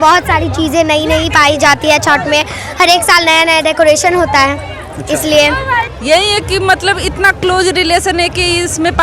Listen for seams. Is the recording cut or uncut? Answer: cut